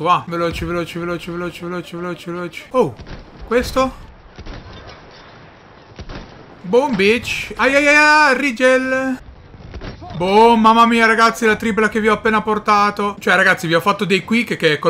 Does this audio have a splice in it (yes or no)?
yes